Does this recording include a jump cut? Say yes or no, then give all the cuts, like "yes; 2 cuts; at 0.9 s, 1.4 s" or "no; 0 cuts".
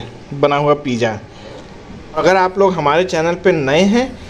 yes; 1 cut; at 2.2 s